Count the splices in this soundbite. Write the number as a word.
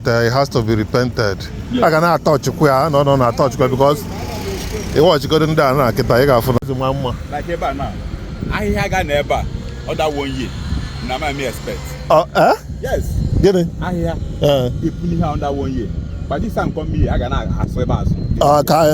one